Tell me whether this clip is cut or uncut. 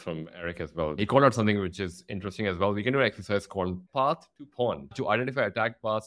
cut